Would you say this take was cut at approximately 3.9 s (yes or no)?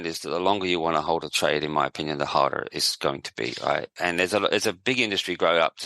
yes